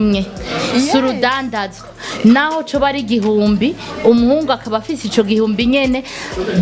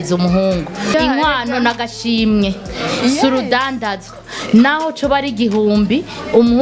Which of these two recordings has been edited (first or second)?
second